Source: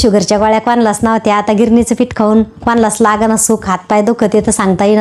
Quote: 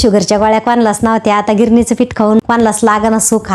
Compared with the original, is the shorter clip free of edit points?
no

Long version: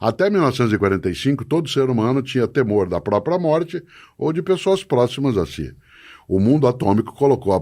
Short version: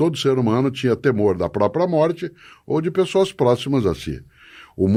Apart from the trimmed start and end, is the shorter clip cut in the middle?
no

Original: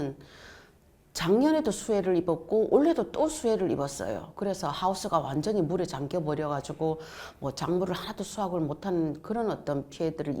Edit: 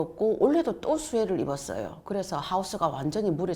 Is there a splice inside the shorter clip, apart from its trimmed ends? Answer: no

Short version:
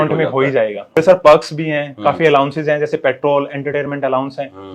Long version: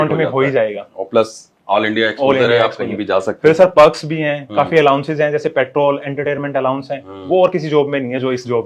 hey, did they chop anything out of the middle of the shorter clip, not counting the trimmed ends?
yes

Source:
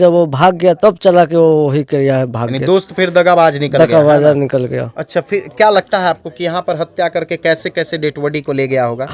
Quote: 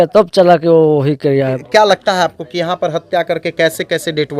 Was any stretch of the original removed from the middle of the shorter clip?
yes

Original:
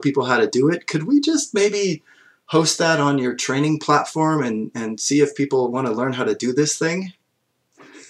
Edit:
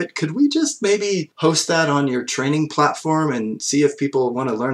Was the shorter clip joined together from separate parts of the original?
yes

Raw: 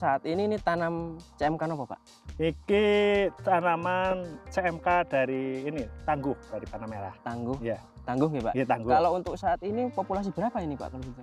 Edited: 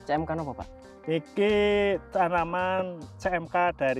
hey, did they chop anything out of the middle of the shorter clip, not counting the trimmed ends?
no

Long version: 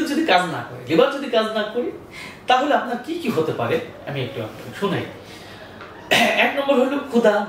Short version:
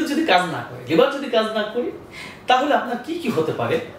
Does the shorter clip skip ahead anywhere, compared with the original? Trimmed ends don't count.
no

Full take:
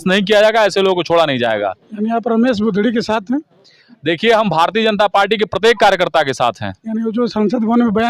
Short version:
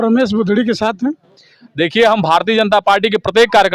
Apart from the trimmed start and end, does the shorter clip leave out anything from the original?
no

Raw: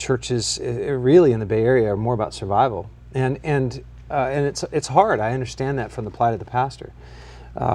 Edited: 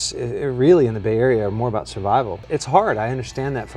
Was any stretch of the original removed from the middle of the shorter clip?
yes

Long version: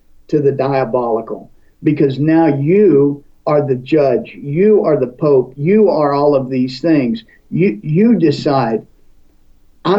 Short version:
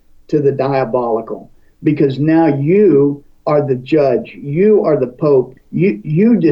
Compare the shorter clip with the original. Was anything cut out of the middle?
yes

